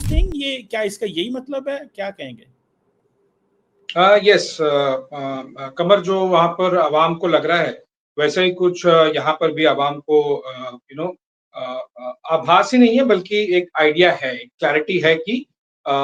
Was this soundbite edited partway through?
no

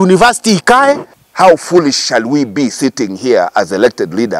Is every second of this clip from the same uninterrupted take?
no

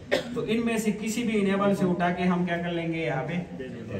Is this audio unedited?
yes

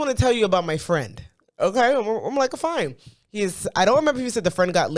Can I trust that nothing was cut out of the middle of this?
yes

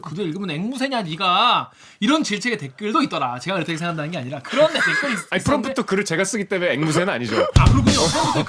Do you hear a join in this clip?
no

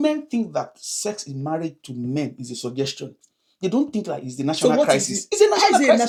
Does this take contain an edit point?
no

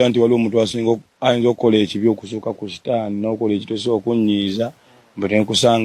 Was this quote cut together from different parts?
no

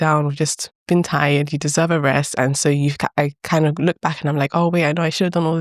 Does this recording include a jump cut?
no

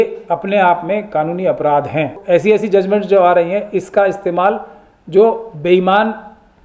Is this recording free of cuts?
no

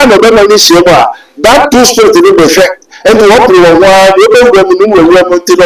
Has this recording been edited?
no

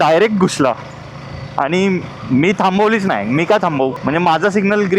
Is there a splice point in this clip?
yes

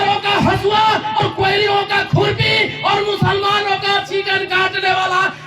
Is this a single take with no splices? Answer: no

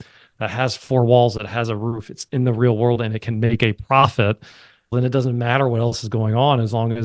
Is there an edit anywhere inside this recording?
no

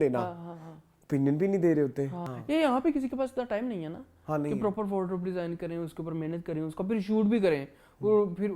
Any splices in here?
yes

